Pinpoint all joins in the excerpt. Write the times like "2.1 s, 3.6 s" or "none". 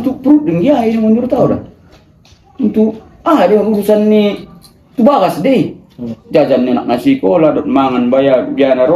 none

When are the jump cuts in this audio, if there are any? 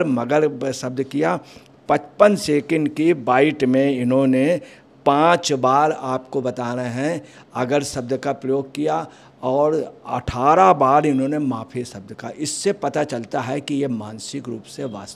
none

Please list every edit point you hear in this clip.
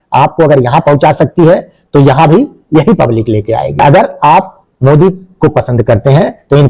none

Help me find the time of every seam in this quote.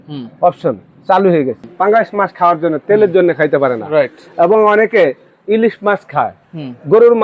1.6 s

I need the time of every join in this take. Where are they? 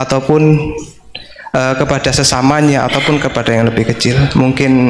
none

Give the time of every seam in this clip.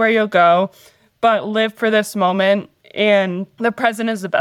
3.5 s

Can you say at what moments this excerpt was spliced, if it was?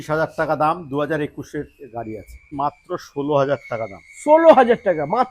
2.5 s

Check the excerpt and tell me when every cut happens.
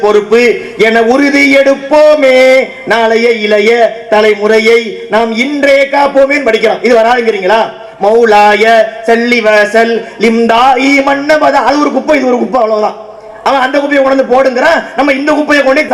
none

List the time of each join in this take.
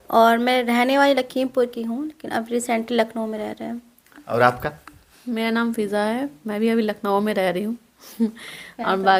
none

